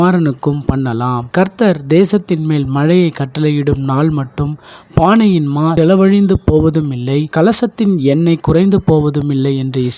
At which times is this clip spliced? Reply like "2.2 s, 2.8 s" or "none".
1.2 s